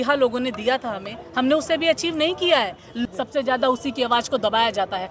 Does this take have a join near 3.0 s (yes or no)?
yes